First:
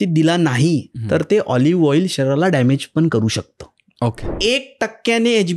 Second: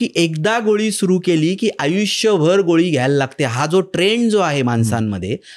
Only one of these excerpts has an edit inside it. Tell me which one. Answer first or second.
first